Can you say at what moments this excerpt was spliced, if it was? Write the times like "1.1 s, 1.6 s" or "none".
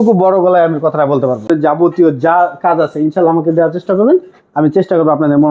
1.5 s